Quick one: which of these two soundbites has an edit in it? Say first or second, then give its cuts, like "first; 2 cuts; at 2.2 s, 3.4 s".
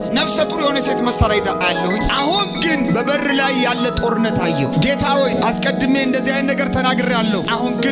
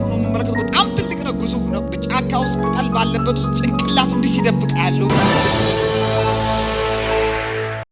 second; 1 cut; at 5.1 s